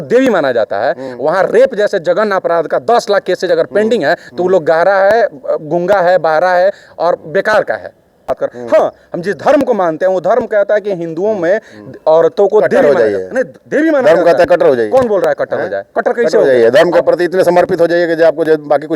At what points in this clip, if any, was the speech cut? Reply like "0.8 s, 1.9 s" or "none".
8.3 s